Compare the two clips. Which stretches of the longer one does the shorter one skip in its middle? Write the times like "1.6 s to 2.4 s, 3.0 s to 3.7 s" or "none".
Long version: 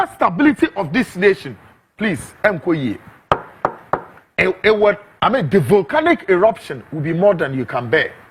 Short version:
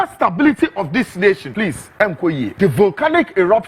1.5 s to 1.9 s, 3.0 s to 5.5 s